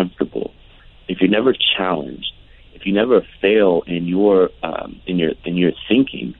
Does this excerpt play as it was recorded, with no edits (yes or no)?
yes